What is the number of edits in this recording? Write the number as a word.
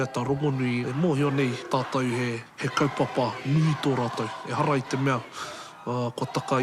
three